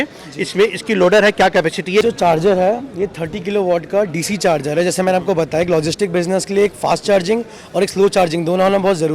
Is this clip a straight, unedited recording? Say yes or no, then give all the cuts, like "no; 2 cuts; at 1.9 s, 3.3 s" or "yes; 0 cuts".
no; 1 cut; at 2.0 s